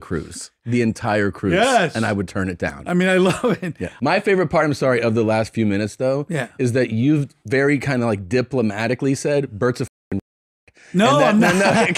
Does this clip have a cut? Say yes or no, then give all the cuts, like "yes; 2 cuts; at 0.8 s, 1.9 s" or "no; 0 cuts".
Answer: yes; 1 cut; at 3.8 s